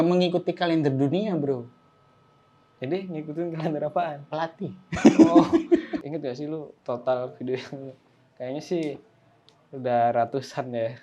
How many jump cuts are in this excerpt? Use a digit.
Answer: 1